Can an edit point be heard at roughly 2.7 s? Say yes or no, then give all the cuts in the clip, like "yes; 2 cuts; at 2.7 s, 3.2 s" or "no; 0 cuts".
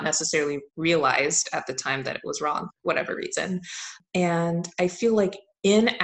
no; 1 cut; at 4.0 s